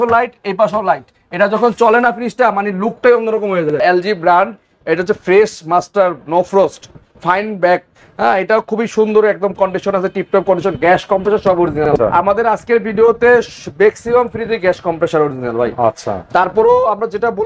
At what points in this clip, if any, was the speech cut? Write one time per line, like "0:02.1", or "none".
0:03.8
0:11.9